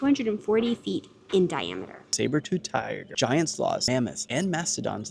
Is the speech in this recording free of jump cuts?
no; 3 cuts; at 2.1 s, 3.0 s, 4.0 s

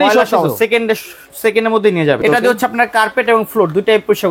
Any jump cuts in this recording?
yes; 1 cut; at 2.2 s

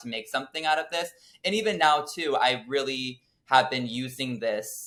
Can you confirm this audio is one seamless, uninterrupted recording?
yes; 0 cuts

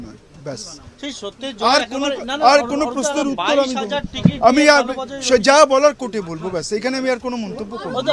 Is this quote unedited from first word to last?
yes; 0 cuts

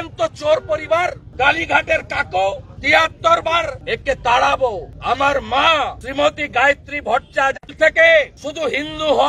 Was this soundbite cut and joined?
no; 0 cuts

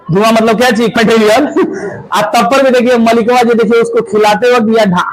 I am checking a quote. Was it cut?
yes; 1 cut; at 1.0 s

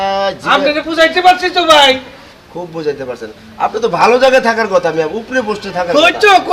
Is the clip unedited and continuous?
yes; 0 cuts

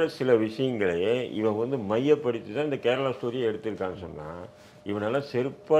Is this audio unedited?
yes; 0 cuts

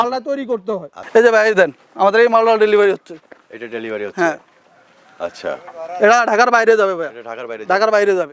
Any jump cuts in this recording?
yes; 1 cut; at 0.9 s

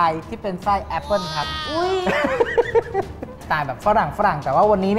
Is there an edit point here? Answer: yes; 1 cut; at 3.3 s

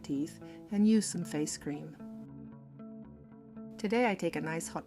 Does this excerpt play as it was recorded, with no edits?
no; 2 cuts; at 1.9 s, 3.8 s

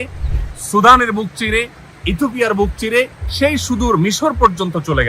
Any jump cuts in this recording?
no; 0 cuts

